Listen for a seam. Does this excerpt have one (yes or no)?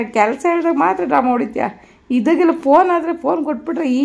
no